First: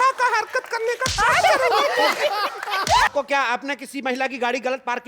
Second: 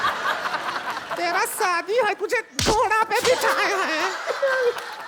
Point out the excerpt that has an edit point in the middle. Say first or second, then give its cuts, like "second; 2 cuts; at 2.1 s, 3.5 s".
first; 1 cut; at 3.1 s